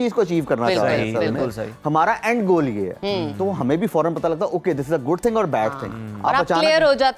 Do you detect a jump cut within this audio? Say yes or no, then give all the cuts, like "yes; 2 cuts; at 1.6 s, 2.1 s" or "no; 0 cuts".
no; 0 cuts